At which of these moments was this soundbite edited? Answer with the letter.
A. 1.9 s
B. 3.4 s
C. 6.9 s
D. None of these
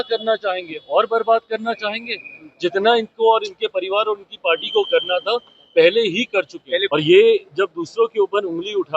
C